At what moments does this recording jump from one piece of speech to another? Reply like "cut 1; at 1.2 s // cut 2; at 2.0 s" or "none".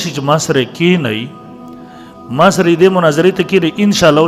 none

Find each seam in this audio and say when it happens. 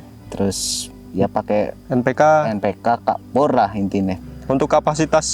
cut 1; at 4.2 s

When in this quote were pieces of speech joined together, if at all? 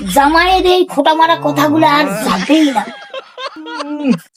none

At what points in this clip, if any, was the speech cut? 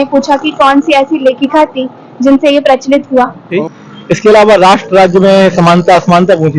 cut 1; at 3.5 s // cut 2; at 4.8 s

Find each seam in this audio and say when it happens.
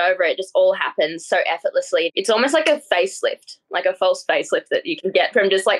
cut 1; at 2.2 s

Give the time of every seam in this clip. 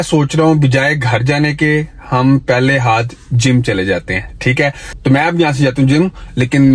none

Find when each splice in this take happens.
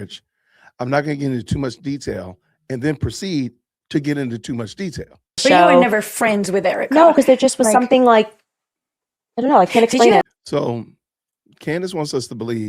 cut 1; at 5.4 s // cut 2; at 10.2 s

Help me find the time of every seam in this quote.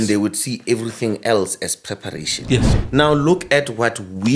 cut 1; at 2.7 s

